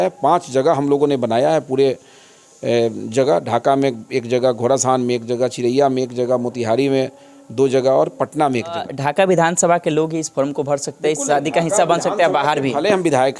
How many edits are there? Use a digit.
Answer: 1